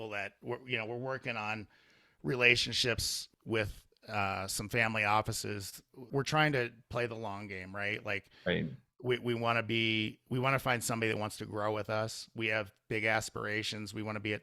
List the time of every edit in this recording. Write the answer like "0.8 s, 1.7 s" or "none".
3.3 s, 6.1 s